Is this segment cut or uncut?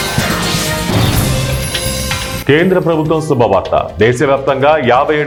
uncut